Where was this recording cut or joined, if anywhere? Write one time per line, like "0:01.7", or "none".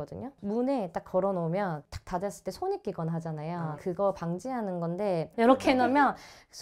0:01.8
0:05.3